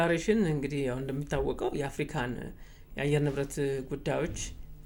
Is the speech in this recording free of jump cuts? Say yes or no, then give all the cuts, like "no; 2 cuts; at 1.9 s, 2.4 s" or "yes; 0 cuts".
yes; 0 cuts